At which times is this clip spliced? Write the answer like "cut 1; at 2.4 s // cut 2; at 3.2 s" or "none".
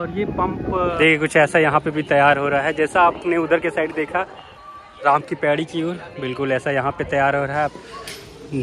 cut 1; at 0.9 s // cut 2; at 7.7 s